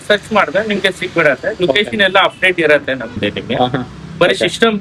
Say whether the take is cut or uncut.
cut